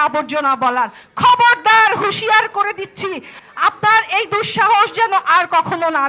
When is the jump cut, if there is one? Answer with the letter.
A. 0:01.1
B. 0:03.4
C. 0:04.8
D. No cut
B